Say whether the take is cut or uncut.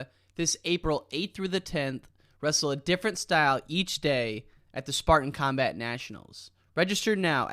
uncut